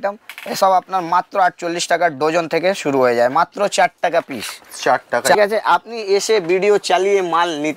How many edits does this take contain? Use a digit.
1